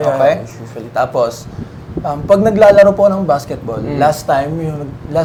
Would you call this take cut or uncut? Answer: uncut